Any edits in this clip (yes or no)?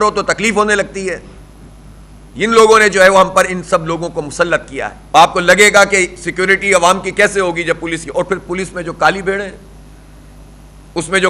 yes